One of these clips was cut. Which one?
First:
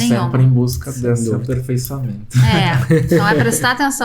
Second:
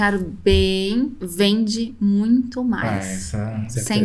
second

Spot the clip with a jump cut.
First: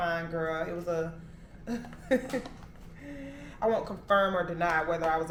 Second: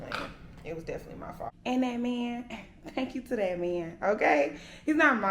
second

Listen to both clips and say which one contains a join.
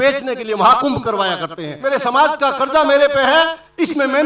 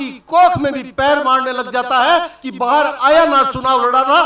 first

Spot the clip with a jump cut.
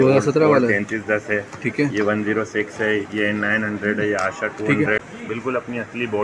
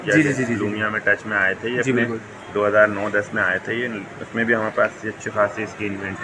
first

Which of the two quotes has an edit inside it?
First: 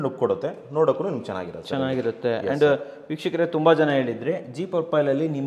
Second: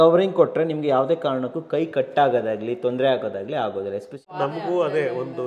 second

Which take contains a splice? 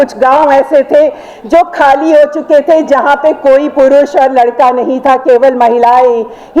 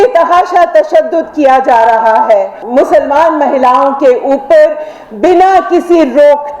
second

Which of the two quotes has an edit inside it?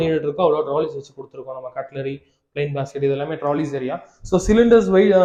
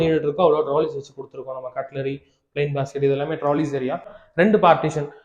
second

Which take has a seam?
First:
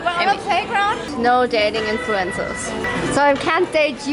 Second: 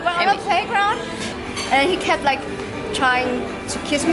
first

